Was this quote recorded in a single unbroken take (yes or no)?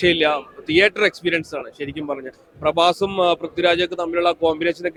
yes